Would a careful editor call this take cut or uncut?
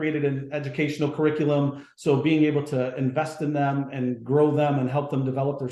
uncut